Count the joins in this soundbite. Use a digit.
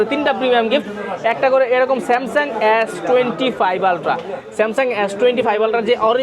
0